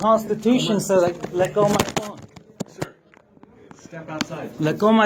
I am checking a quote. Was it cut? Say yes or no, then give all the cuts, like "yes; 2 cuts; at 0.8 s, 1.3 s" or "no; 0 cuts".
no; 0 cuts